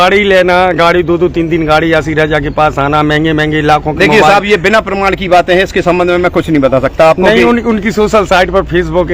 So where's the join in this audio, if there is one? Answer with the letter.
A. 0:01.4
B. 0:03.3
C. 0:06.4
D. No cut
D